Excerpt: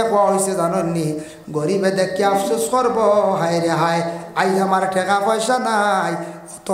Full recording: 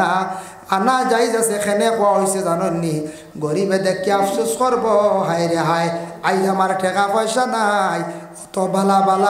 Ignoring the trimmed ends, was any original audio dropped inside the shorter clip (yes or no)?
no